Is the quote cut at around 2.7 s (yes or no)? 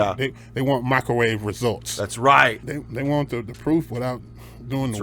yes